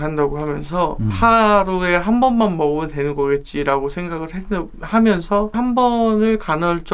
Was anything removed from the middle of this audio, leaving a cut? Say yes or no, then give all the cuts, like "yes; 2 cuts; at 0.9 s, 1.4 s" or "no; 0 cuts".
yes; 2 cuts; at 1.1 s, 5.6 s